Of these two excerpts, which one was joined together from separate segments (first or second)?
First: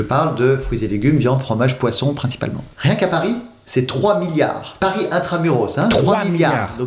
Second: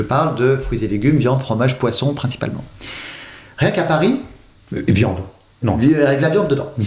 first